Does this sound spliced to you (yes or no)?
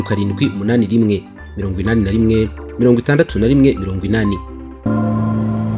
yes